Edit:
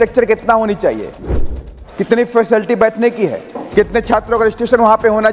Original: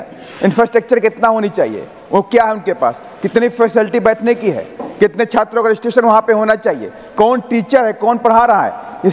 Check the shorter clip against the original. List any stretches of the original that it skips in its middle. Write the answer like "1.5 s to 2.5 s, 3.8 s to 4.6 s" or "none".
2.1 s to 2.6 s